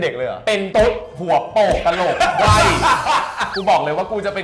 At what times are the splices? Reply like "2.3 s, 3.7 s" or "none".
3.5 s